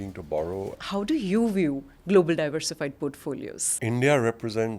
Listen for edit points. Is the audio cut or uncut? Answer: cut